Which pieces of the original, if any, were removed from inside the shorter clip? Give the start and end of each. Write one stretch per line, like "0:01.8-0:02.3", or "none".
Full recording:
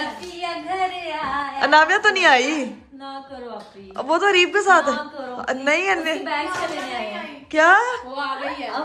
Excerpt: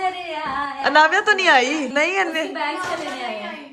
0:02.7-0:05.6